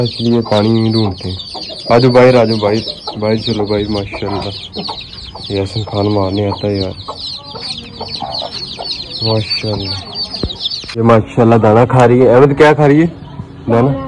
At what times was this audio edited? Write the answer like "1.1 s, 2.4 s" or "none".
none